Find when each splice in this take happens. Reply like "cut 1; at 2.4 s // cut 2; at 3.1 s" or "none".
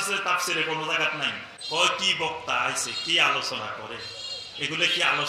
cut 1; at 1.5 s